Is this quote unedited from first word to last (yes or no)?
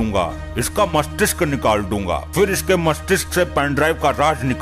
yes